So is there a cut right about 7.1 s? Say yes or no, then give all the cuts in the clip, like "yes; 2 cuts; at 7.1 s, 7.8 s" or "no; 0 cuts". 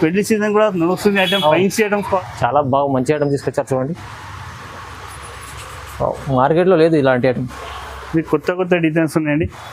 no; 1 cut; at 2.2 s